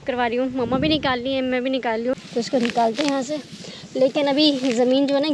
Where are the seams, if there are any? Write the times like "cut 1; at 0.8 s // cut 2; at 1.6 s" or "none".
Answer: cut 1; at 2.1 s